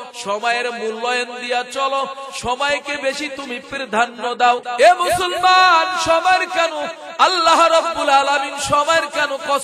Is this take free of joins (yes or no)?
no